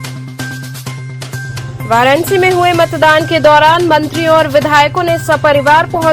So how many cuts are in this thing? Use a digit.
1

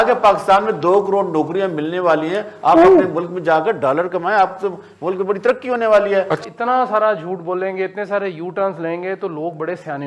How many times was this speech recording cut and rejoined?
1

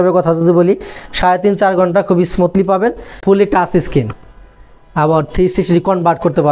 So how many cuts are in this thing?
1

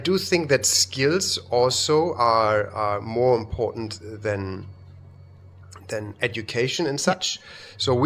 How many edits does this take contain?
0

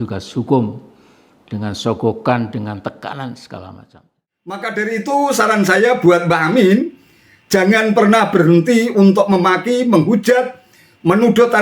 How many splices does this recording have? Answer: 1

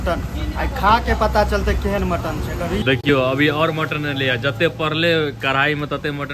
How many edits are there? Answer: 1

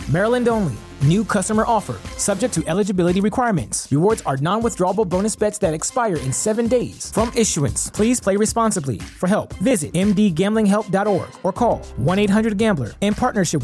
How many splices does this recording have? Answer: 0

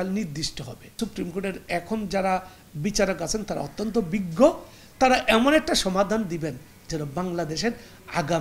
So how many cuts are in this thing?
1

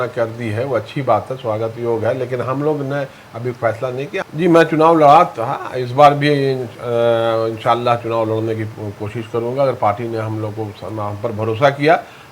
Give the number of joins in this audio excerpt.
1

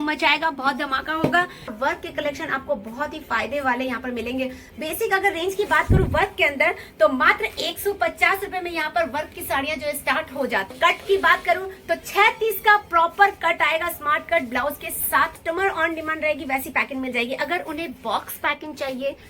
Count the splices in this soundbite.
3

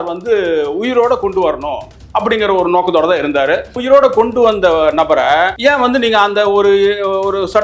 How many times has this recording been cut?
2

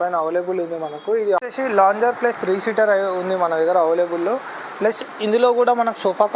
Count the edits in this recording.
1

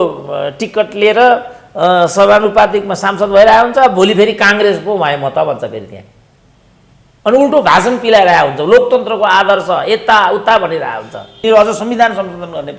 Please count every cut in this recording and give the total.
1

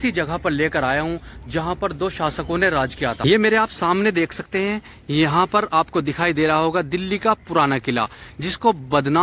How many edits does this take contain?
1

